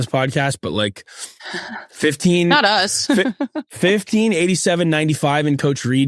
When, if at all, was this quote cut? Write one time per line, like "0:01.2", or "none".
none